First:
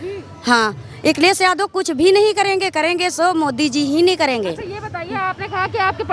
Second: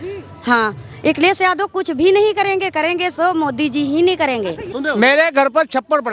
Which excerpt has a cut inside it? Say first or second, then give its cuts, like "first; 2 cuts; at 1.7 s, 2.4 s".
second; 1 cut; at 4.7 s